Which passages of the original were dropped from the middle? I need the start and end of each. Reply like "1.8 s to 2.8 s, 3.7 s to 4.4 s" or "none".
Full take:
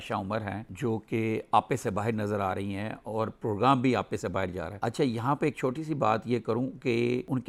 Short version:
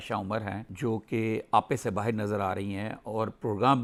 none